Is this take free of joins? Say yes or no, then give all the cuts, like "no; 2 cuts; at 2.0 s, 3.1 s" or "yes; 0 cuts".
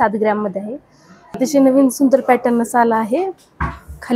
no; 1 cut; at 1.4 s